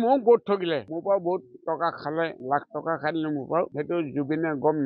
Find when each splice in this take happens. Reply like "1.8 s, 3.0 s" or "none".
0.9 s, 2.4 s, 3.7 s